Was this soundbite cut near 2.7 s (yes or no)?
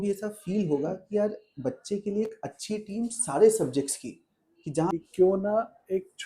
no